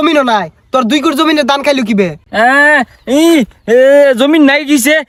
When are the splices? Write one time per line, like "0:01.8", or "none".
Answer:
none